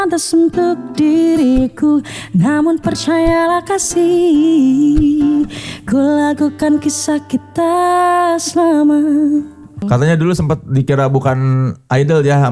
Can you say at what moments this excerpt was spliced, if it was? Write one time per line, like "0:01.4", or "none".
0:09.8